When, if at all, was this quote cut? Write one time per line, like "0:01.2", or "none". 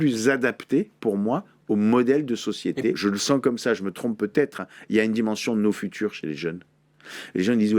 0:03.0